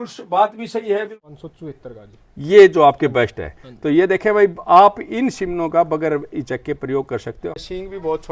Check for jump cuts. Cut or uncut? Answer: cut